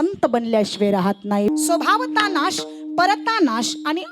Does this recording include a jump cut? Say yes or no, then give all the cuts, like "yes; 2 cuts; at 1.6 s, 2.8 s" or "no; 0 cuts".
yes; 1 cut; at 1.5 s